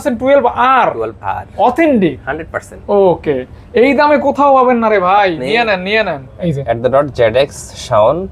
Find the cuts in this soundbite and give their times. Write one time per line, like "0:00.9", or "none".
0:06.5